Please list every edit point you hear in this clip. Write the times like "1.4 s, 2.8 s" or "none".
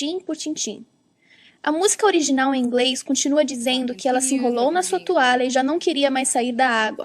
none